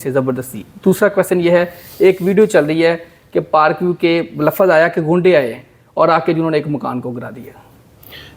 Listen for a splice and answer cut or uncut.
uncut